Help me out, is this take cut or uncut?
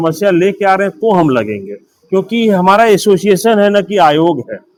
uncut